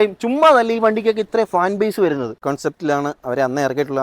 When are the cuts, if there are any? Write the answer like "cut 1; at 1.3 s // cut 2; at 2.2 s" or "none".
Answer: cut 1; at 2.5 s